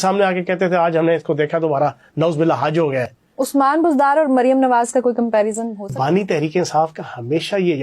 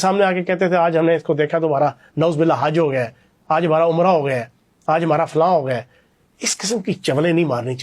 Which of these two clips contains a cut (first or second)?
first